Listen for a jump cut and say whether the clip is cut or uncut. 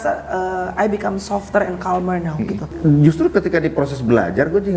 cut